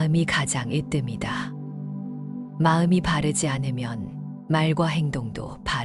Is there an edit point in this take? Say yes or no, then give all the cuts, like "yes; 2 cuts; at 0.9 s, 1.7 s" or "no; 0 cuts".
yes; 2 cuts; at 1.2 s, 2.6 s